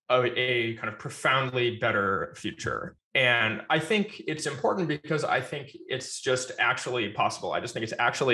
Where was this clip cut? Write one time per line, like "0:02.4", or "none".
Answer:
none